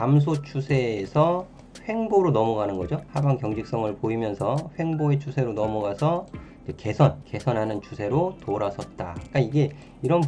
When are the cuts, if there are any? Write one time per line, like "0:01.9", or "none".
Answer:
0:03.1
0:07.3